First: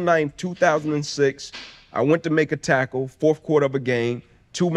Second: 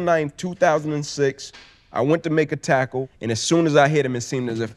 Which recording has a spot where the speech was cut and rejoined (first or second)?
second